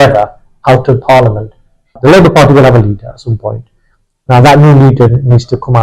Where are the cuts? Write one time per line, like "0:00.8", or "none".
0:02.0